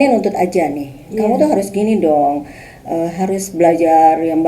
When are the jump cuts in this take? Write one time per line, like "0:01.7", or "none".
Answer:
none